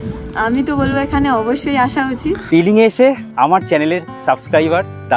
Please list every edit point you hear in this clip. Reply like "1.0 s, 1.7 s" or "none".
2.4 s